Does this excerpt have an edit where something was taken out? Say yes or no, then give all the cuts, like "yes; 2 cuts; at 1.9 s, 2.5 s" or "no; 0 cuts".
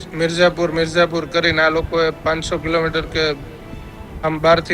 no; 0 cuts